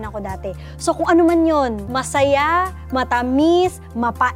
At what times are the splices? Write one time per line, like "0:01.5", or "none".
0:01.9